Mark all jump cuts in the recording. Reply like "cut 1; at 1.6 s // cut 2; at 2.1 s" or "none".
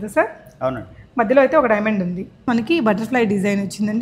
cut 1; at 2.4 s